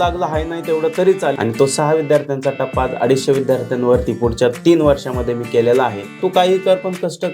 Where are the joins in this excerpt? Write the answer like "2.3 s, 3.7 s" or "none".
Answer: 1.3 s, 6.2 s